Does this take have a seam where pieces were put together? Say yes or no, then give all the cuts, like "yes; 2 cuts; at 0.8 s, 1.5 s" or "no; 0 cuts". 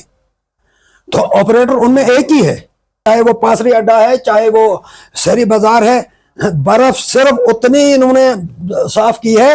yes; 1 cut; at 3.0 s